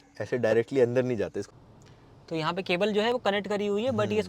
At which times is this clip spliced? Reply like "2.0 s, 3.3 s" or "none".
1.5 s

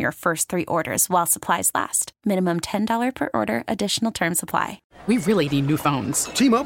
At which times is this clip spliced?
4.8 s

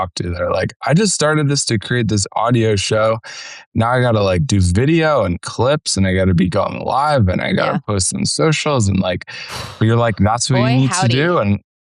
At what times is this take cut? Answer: 3.7 s

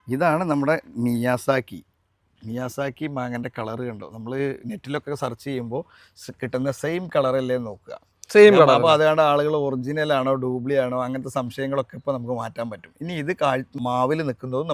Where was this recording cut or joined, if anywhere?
13.8 s

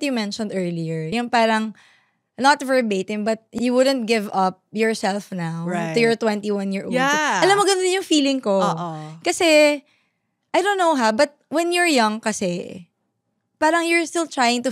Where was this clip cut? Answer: none

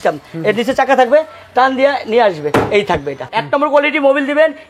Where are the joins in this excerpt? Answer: 3.3 s

